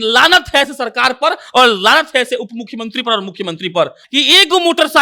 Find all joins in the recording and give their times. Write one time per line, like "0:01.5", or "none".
0:04.0